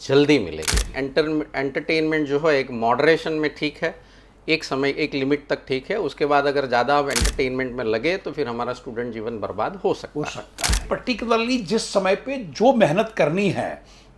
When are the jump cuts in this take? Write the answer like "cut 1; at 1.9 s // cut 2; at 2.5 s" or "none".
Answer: cut 1; at 0.9 s // cut 2; at 10.8 s